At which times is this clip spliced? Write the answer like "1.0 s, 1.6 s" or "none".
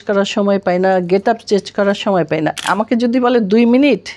2.6 s